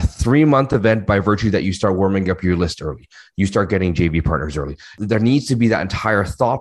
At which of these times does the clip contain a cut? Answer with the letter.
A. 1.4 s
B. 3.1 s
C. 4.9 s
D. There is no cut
C